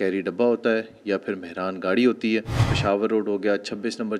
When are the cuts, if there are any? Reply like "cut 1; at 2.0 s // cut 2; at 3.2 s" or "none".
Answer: cut 1; at 2.6 s